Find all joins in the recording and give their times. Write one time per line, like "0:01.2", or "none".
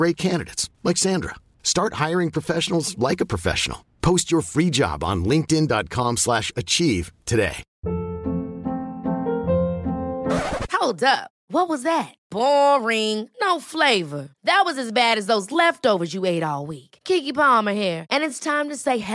0:07.7